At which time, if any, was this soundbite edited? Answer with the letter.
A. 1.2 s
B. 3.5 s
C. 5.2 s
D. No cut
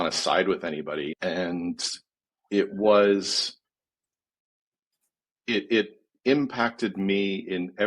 A